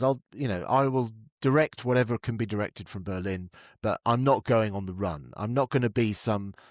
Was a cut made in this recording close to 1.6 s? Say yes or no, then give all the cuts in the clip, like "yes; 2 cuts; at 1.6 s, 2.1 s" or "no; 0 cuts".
no; 0 cuts